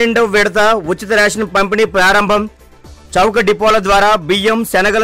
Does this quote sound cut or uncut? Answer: uncut